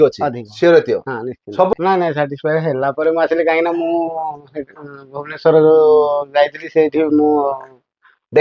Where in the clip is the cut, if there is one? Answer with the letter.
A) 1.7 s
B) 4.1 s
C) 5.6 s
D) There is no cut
A